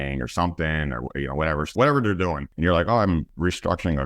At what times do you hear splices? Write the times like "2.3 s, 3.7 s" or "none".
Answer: 1.7 s, 2.5 s, 3.3 s

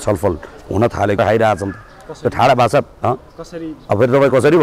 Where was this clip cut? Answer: 1.2 s

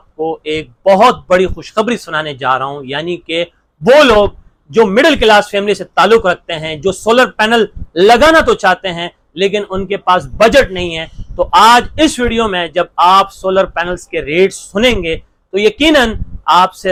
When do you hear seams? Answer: none

